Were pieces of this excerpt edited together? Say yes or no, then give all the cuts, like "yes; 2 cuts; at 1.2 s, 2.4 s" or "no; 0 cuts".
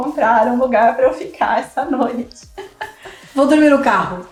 no; 0 cuts